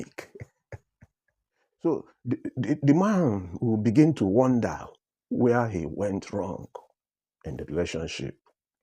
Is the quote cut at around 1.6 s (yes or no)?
yes